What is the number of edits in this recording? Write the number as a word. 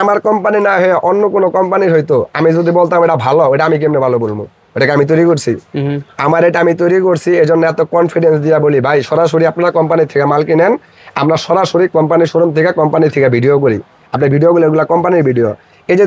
zero